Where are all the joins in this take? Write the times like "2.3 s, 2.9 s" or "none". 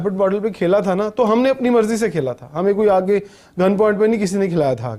none